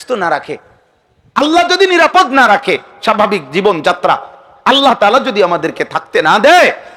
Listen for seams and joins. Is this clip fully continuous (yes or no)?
yes